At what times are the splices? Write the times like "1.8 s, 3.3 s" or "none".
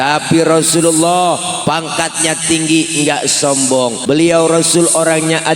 4.0 s